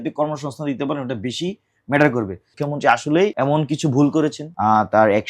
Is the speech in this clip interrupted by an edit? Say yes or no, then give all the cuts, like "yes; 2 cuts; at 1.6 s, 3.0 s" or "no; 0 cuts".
yes; 3 cuts; at 2.5 s, 3.3 s, 4.5 s